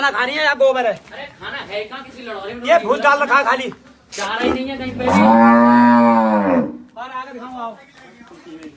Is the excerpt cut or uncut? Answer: uncut